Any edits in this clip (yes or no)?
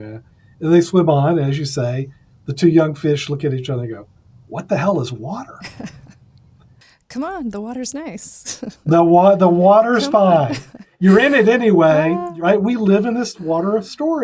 yes